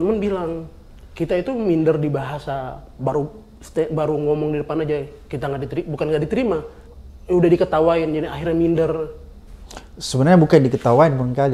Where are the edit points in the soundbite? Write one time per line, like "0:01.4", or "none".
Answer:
none